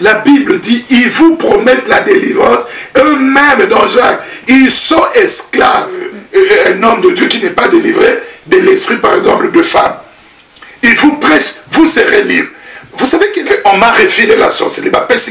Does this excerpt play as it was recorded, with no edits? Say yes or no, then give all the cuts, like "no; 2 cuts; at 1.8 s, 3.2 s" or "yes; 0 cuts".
no; 2 cuts; at 6.2 s, 13.4 s